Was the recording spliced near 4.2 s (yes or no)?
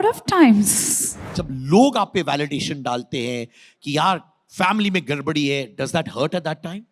no